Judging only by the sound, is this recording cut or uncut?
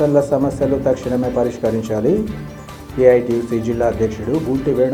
uncut